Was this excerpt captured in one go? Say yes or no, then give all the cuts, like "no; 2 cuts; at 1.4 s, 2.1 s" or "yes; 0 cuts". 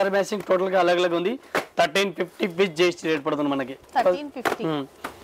yes; 0 cuts